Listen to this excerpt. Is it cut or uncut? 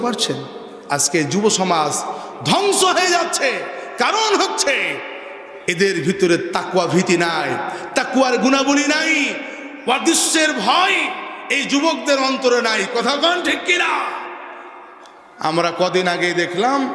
uncut